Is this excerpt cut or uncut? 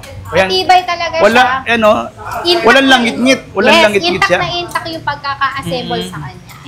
uncut